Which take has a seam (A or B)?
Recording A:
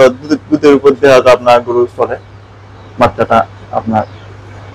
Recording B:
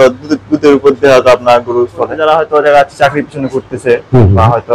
B